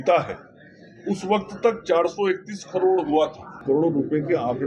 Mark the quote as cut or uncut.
cut